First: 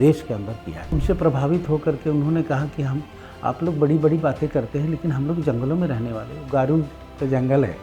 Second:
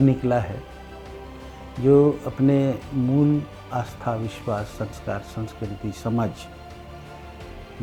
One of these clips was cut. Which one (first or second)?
first